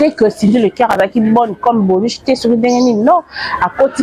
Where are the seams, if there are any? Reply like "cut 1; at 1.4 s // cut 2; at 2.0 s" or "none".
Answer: none